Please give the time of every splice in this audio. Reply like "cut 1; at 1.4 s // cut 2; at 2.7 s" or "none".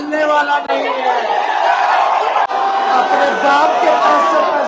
cut 1; at 2.5 s